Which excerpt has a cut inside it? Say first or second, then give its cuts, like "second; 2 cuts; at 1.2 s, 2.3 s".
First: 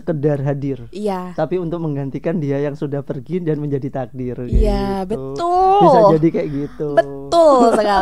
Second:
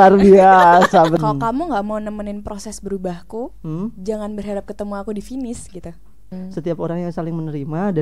second; 2 cuts; at 1.1 s, 6.3 s